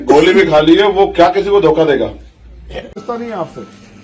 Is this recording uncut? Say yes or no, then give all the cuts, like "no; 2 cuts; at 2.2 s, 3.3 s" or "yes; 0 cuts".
no; 1 cut; at 3.0 s